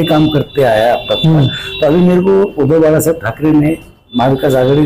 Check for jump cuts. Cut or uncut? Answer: uncut